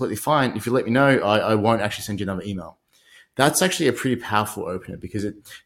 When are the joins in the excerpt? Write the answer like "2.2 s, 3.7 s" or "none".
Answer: none